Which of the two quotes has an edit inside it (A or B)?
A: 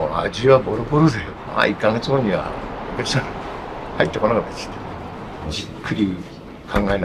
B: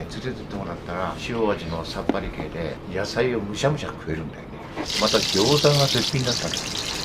B